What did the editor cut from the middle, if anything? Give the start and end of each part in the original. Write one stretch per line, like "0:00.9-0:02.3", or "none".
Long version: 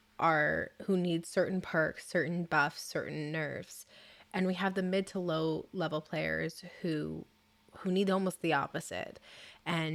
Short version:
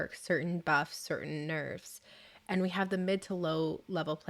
none